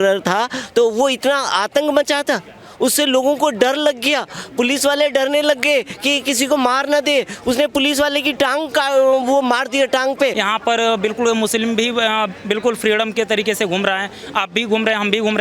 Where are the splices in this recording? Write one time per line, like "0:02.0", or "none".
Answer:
0:10.4